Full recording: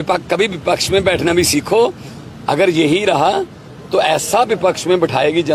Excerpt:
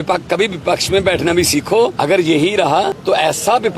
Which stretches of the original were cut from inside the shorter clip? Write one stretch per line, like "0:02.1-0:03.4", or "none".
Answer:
0:02.0-0:02.5
0:03.5-0:03.8